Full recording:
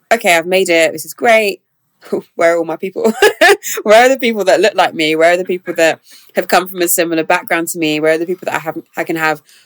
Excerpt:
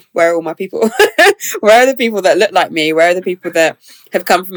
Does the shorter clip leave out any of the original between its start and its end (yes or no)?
no